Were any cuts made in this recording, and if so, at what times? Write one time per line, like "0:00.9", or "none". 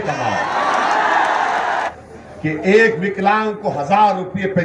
0:01.9